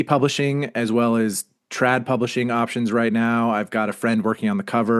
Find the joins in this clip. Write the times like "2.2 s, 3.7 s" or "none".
none